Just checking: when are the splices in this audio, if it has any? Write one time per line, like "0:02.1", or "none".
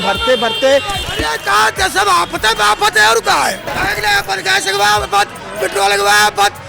0:01.0
0:03.7

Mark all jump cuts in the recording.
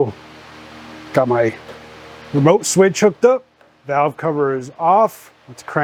none

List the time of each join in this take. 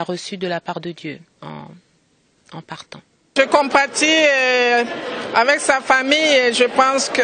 0:03.3

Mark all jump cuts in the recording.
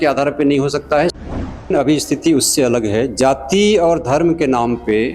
0:01.7

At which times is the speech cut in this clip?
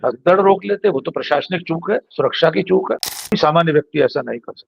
0:03.3

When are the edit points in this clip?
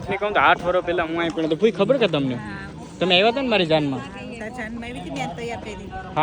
none

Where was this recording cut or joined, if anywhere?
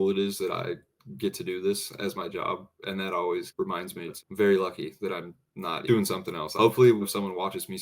0:04.1
0:05.9
0:07.0

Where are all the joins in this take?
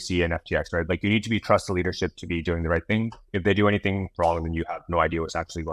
none

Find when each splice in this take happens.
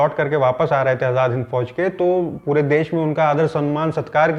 none

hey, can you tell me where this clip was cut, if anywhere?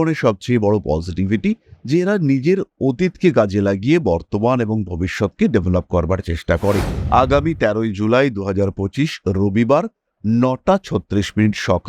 0:06.9

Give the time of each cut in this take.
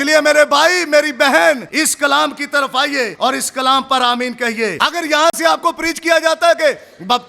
0:01.7
0:03.1
0:04.7

